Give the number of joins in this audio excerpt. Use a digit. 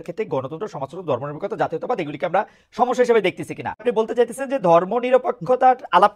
1